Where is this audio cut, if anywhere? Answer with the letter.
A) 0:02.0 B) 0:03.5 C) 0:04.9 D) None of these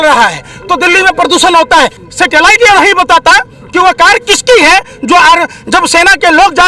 A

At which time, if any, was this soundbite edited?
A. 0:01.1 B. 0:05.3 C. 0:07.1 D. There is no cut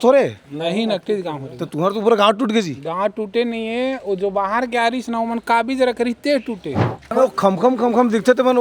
C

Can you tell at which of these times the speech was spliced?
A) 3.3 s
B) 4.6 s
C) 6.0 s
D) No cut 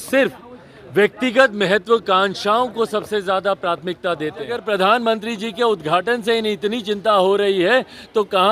B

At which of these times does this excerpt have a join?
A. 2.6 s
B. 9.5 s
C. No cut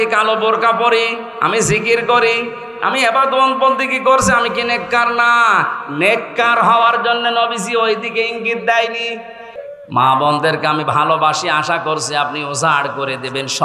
B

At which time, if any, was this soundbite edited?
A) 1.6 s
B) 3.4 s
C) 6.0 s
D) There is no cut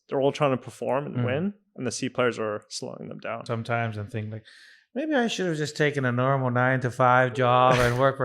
B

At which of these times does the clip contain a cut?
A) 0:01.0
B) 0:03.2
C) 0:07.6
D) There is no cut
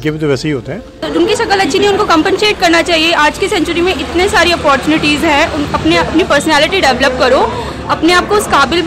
A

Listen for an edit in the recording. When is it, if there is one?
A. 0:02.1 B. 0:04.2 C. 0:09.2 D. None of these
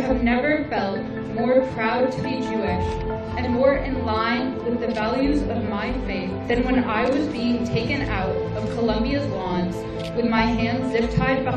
D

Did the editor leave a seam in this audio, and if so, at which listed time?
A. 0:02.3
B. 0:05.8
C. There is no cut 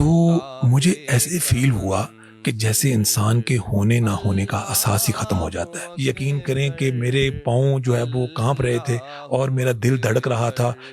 B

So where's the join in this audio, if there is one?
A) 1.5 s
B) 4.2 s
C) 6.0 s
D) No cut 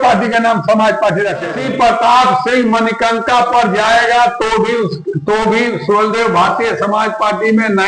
A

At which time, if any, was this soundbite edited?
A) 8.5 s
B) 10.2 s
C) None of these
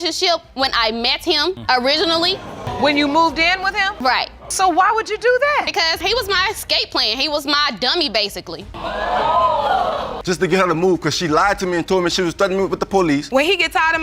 B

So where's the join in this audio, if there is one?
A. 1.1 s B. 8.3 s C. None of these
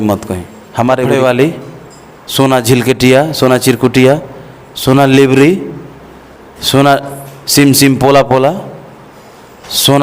A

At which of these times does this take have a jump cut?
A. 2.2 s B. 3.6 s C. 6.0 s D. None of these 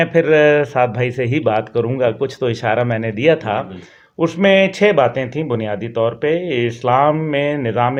D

